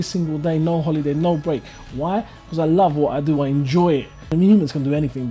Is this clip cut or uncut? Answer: cut